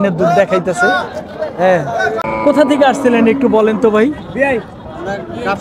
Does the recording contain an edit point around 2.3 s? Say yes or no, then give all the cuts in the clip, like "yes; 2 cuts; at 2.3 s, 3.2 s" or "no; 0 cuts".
yes; 1 cut; at 2.3 s